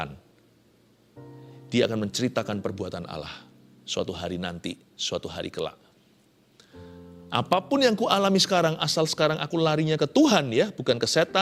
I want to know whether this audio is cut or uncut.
uncut